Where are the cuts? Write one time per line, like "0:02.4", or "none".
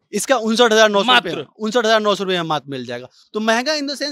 none